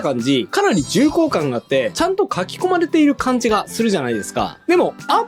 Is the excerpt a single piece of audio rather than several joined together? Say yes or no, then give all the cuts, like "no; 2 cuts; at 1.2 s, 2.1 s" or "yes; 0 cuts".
no; 1 cut; at 1.9 s